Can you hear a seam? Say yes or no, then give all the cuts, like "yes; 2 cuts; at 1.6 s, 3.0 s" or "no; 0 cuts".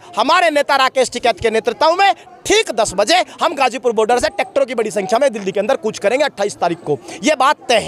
no; 0 cuts